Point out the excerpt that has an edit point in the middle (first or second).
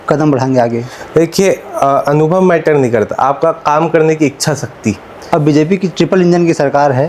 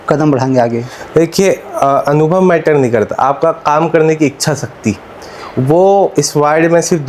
first